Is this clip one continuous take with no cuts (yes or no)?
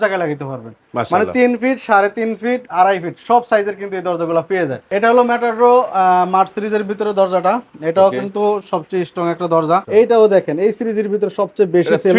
no